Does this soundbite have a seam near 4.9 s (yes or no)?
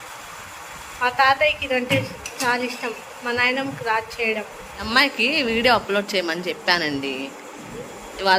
yes